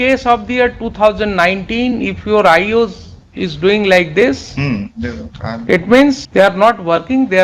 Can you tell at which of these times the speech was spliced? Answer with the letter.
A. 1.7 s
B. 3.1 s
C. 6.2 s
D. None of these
C